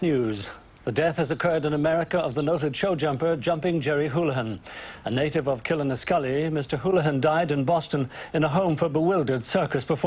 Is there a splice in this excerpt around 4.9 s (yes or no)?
yes